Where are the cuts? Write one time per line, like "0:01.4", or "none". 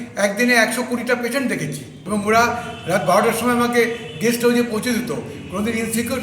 0:01.9